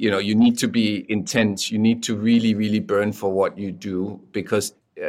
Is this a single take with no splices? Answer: yes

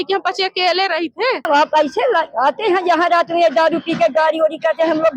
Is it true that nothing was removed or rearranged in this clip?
no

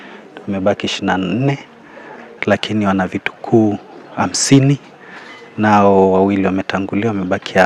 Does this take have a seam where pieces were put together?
no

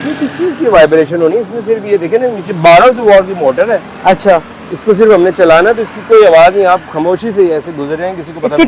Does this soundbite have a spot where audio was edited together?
no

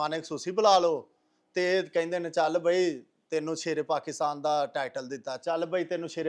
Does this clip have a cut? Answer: no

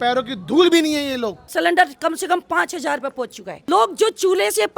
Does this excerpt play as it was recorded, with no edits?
no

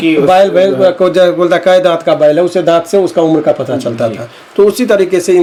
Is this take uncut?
yes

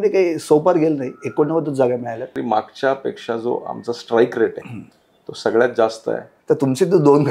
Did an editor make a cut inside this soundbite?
yes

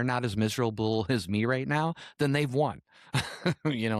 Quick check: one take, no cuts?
yes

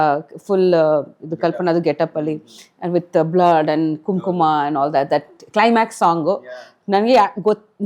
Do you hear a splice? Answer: no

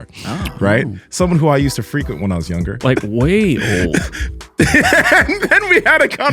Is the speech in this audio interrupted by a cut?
yes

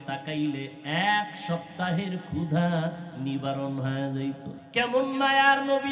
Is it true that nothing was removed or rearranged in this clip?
no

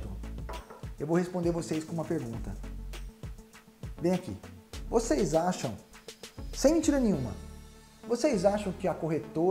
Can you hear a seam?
yes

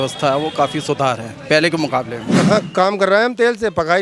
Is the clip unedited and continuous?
no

